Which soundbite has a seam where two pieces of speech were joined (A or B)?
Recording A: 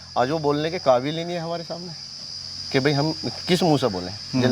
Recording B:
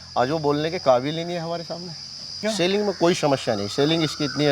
B